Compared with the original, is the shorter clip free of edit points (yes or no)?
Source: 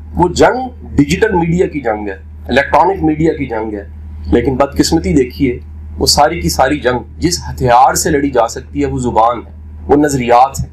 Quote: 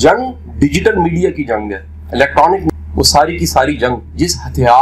no